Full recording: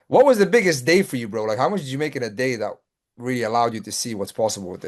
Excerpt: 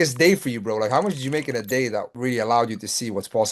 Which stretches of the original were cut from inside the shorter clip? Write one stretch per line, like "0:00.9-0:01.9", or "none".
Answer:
0:02.8-0:03.2